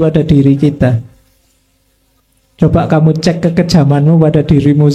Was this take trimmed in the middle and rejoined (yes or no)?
no